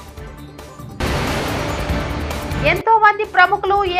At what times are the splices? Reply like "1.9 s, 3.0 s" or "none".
2.5 s